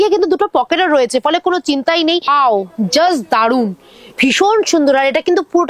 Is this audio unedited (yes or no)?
no